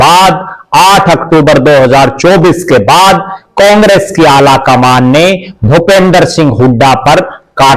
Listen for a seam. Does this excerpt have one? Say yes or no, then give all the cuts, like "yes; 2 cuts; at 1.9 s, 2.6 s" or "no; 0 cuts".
no; 0 cuts